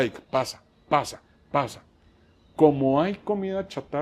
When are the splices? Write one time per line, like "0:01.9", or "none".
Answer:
none